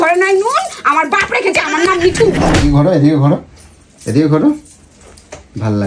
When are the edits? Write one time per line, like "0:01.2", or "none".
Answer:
0:02.5